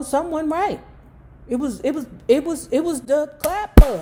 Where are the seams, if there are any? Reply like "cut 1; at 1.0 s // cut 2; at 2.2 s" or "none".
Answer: none